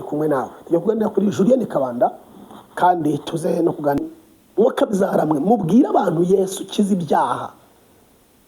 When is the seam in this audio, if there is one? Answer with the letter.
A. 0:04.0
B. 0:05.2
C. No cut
A